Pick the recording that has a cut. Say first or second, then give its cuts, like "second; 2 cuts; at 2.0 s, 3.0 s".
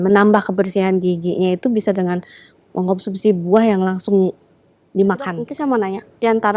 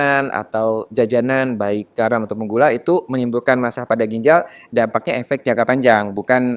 first; 1 cut; at 5.4 s